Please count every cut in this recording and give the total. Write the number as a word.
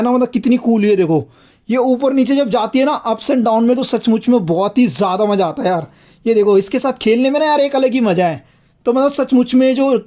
zero